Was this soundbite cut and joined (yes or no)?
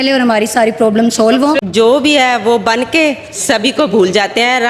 yes